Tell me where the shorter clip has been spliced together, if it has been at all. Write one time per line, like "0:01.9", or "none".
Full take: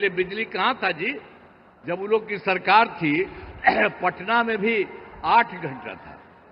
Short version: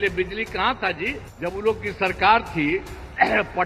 0:01.2